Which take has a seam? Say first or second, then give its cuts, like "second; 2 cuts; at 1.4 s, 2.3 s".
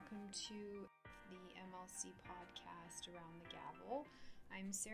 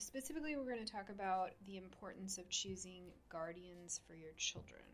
first; 1 cut; at 0.9 s